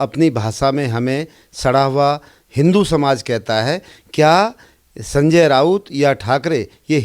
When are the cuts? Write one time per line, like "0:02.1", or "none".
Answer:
none